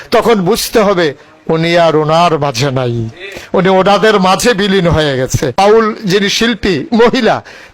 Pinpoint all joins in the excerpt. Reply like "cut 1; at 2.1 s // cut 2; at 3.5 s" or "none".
cut 1; at 5.5 s